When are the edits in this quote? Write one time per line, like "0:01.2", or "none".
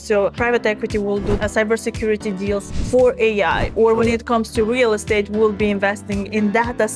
0:01.4